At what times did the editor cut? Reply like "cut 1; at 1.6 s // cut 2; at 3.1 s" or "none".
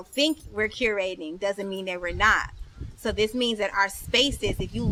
none

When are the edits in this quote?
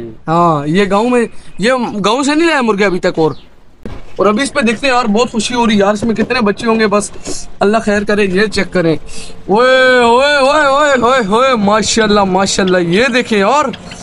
cut 1; at 3.8 s

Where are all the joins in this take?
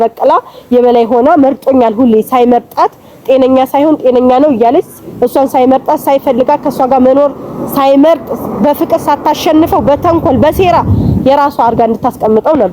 none

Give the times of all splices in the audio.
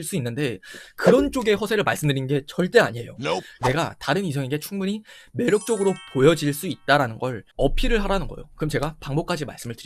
cut 1; at 3.5 s // cut 2; at 7.4 s

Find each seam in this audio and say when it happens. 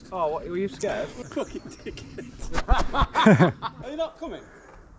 cut 1; at 1.2 s // cut 2; at 3.7 s

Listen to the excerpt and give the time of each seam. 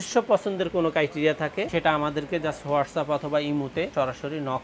cut 1; at 1.7 s // cut 2; at 3.9 s

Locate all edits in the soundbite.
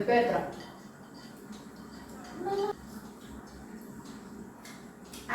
cut 1; at 2.7 s

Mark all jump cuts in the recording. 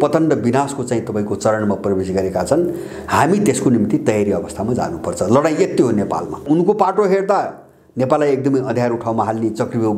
cut 1; at 6.4 s

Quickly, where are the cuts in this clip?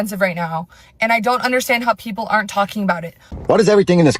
cut 1; at 3.3 s

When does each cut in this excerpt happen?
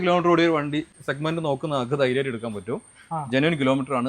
cut 1; at 1.0 s

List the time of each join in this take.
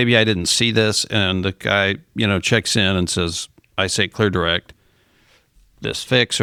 none

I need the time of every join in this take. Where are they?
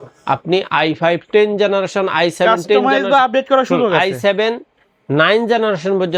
none

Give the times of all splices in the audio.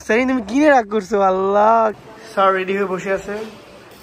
cut 1; at 2.0 s

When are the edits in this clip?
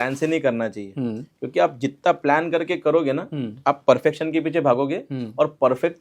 none

